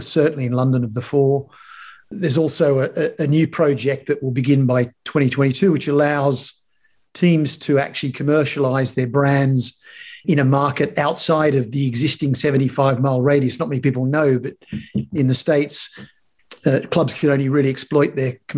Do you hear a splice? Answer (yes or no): yes